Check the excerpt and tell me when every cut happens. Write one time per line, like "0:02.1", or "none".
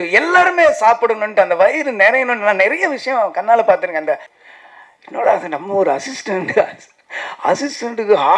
0:04.3